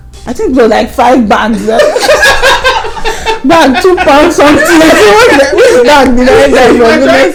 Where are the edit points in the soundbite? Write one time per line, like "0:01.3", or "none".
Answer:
none